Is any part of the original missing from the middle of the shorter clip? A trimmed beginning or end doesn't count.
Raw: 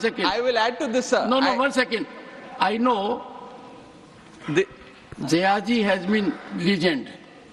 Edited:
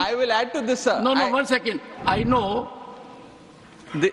yes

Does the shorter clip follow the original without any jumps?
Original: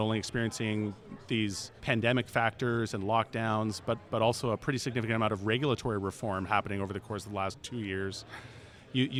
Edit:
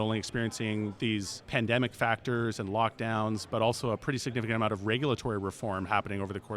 no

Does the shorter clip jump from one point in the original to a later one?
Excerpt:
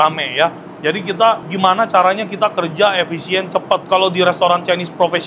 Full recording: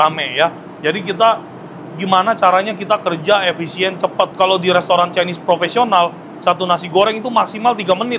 yes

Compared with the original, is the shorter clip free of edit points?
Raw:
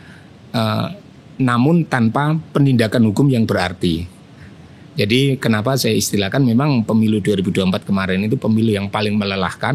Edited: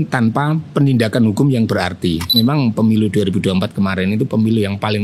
no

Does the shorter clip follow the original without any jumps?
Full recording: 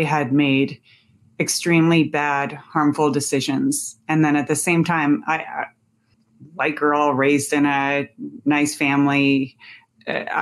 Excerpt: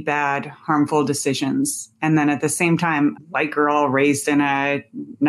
no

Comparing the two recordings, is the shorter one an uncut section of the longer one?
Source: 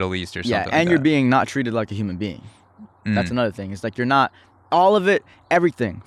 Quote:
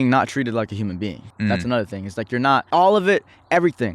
no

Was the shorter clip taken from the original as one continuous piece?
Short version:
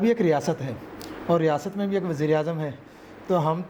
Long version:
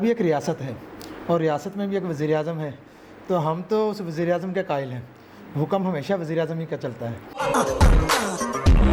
yes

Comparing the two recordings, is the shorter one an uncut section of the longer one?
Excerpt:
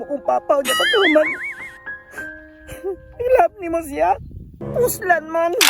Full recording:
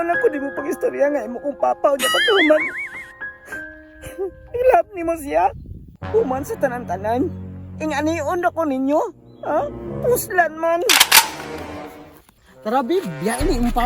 no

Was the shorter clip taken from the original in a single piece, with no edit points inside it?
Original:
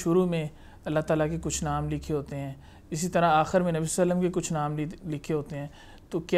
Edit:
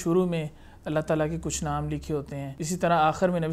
no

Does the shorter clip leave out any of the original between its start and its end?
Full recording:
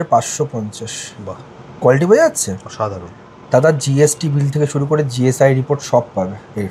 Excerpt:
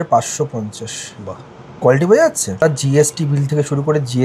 yes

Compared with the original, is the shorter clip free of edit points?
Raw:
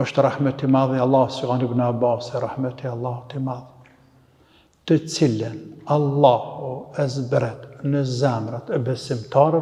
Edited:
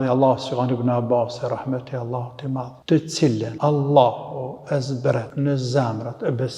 no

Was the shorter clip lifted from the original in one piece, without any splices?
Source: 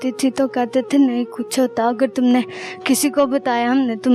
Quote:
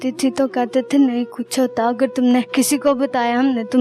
no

